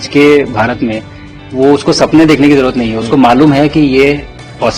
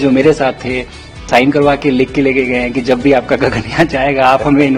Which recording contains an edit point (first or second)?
second